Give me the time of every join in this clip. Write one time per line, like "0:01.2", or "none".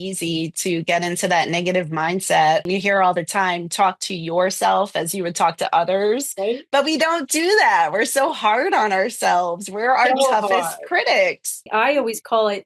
0:02.7
0:11.6